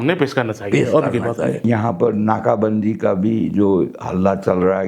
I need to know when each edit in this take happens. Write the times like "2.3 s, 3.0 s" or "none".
1.6 s

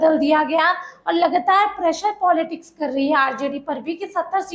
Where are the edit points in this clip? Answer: none

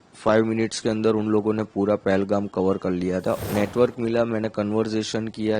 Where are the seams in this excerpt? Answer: 3.4 s

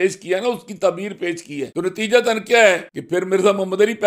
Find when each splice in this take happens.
1.7 s, 2.9 s

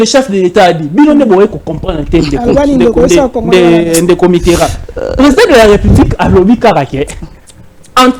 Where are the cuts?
none

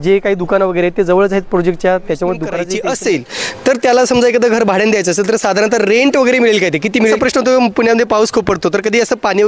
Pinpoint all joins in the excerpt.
2.7 s, 7.2 s

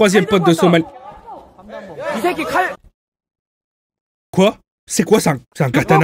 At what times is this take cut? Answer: 4.7 s

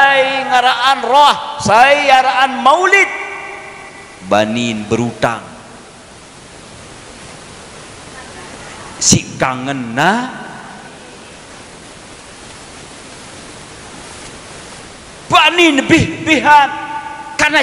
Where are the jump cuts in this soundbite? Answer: 15.1 s

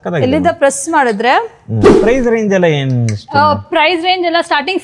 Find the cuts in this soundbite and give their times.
1.9 s

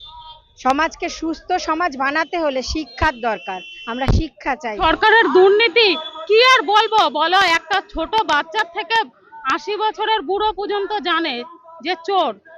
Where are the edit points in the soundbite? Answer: 4.8 s

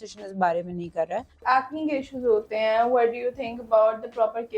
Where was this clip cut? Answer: 1.3 s

